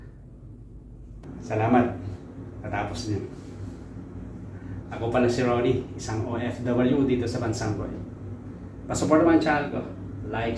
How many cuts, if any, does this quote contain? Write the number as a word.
one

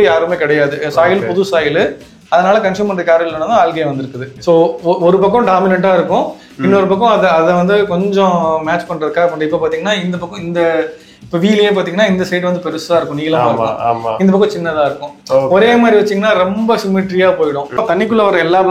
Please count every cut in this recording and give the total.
two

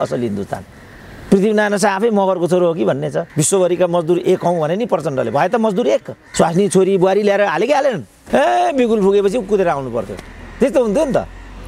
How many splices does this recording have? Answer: three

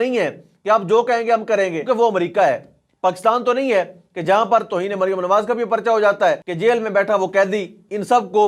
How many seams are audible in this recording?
two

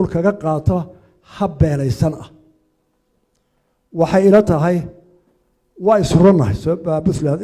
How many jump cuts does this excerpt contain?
zero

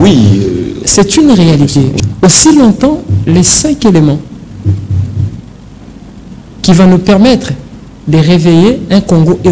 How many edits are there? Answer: one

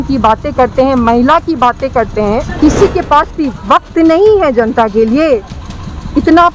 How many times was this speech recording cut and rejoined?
one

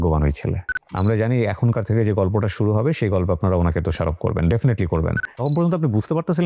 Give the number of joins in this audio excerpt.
two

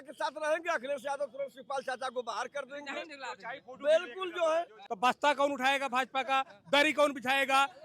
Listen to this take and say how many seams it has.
one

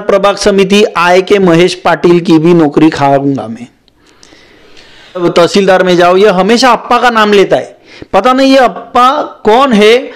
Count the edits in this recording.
one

